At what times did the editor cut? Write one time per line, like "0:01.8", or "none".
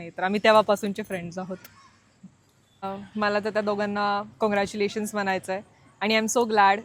0:02.8